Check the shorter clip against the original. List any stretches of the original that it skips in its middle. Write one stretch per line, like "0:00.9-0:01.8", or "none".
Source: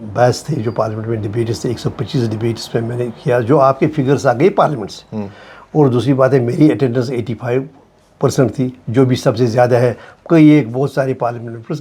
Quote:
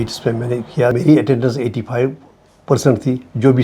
0:03.4-0:06.5